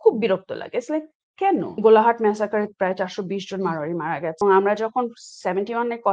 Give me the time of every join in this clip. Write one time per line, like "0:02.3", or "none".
0:01.7
0:04.4

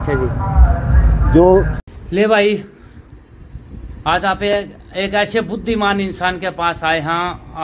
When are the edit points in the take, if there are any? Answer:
0:01.8

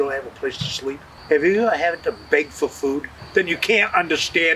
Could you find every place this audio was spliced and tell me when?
0:01.1
0:03.2

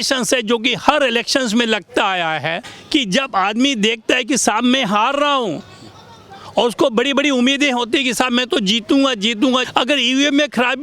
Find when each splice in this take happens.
0:02.7
0:09.7

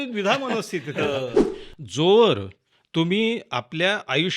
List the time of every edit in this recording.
0:01.4

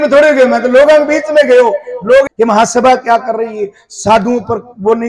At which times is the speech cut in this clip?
0:02.3

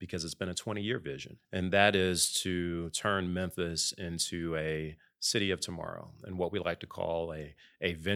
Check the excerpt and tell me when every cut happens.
0:01.4

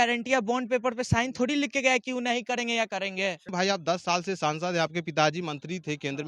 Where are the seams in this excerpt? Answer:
0:03.5

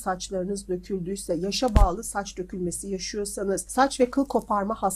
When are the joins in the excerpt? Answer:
0:03.7

